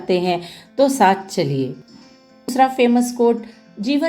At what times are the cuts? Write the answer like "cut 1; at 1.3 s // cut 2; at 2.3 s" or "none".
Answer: cut 1; at 2.5 s